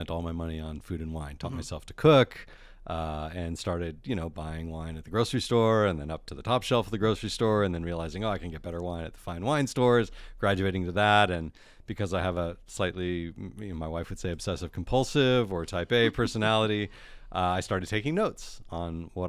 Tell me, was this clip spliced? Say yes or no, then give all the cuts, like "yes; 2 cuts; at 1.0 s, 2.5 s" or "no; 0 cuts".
no; 0 cuts